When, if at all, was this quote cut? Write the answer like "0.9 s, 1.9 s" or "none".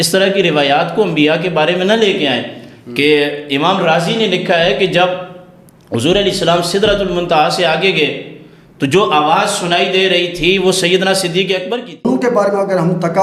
12.0 s